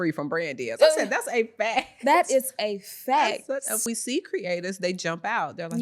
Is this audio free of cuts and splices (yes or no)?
no